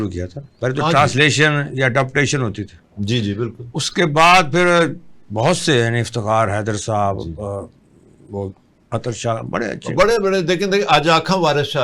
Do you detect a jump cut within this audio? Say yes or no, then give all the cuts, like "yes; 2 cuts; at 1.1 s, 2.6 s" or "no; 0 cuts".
no; 0 cuts